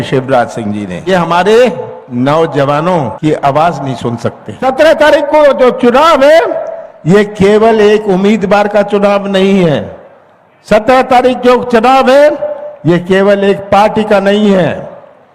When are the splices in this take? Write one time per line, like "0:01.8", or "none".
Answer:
0:01.1
0:03.1
0:04.5